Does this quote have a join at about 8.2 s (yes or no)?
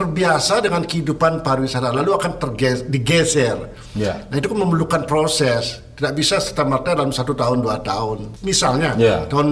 yes